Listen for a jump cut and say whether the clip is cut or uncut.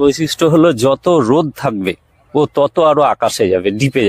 uncut